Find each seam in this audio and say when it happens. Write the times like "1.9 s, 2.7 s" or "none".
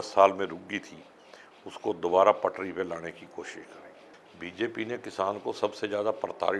4.0 s